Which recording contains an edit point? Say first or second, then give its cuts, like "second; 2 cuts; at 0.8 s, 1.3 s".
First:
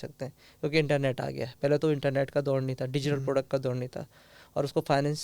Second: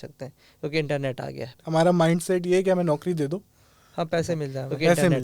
second; 1 cut; at 1.6 s